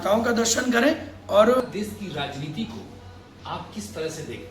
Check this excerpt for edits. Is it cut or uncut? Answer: cut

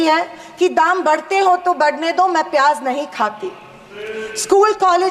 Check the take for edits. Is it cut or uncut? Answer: uncut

